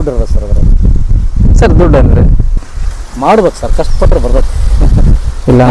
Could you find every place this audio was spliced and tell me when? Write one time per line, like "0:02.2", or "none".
0:02.7